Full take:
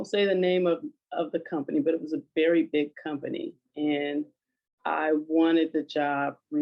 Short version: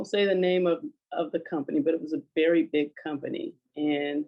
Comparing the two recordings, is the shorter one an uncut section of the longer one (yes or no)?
yes